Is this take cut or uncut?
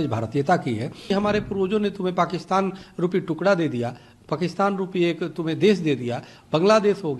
cut